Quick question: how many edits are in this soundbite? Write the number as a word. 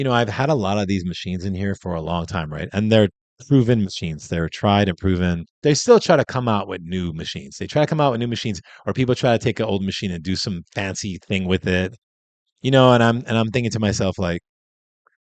one